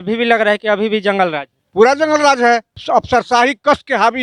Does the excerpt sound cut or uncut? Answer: uncut